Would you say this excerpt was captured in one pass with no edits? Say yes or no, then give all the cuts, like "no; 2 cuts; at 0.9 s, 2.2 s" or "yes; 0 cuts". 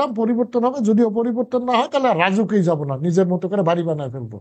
yes; 0 cuts